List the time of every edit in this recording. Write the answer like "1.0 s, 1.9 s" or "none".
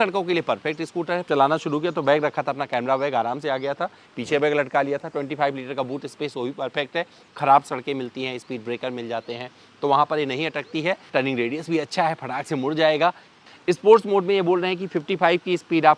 1.2 s, 7.2 s, 11.0 s, 13.4 s

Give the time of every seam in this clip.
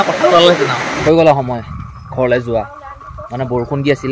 0.9 s

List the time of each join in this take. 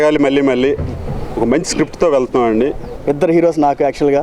2.9 s

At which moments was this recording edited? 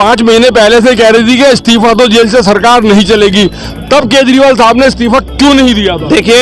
none

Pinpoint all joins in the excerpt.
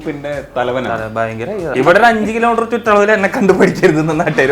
1.7 s

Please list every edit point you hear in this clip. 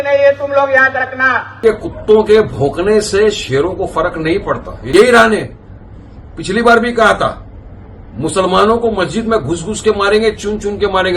1.6 s, 4.7 s

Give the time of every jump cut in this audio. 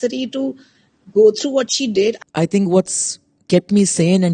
2.2 s

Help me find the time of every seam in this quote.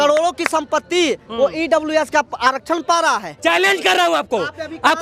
3.3 s

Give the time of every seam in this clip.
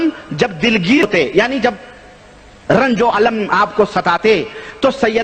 1.0 s

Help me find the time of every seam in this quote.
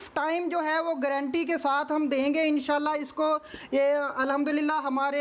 none

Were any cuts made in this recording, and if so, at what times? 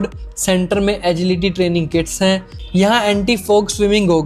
2.6 s

